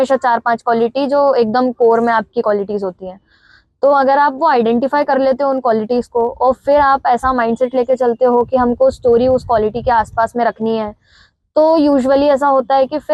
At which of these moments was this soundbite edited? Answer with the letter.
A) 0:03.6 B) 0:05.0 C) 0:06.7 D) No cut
D